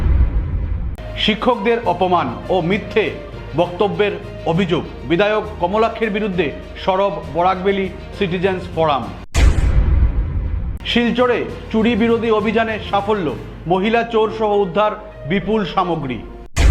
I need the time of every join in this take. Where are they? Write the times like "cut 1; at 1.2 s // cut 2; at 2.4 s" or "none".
cut 1; at 1.0 s